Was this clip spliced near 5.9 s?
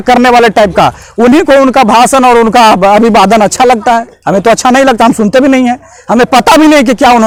no; 0 cuts

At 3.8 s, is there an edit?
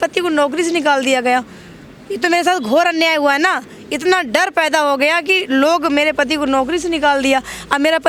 no; 0 cuts

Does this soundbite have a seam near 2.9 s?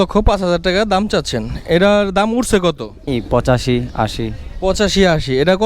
yes; 1 cut; at 2.9 s

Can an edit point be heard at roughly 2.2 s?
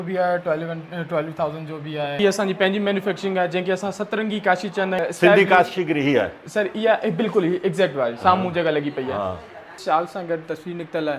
yes; 3 cuts; at 2.2 s, 5.0 s, 9.7 s

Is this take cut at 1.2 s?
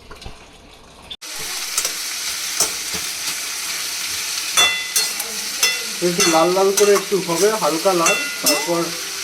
yes; 1 cut; at 1.2 s

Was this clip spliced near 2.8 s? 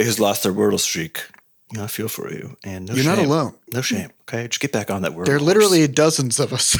no; 1 cut; at 4.2 s

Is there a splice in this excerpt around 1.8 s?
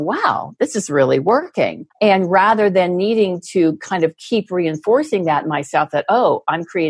yes; 1 cut; at 1.8 s

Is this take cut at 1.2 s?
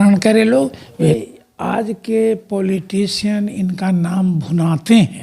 yes; 1 cut; at 1.2 s

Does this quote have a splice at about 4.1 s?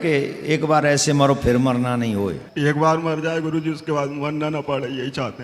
no; 1 cut; at 2.4 s

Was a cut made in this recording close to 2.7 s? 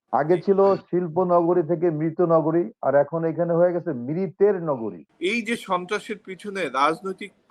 no; 1 cut; at 5.1 s

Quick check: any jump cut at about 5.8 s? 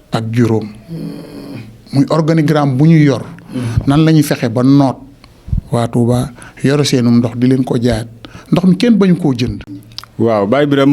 no; 1 cut; at 9.6 s

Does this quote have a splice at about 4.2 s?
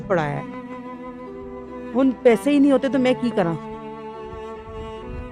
yes; 1 cut; at 4.2 s

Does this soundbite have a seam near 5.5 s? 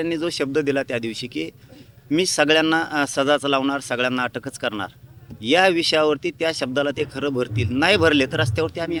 no; 0 cuts

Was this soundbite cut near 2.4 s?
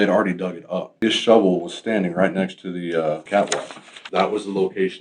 no; 2 cuts; at 0.9 s, 3.8 s

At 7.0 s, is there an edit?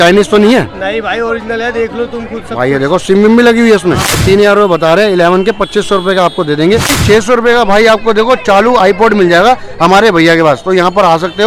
yes; 2 cuts; at 4.2 s, 7.0 s

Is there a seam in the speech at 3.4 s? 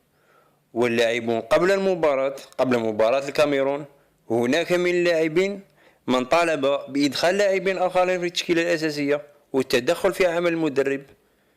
yes; 1 cut; at 3.4 s

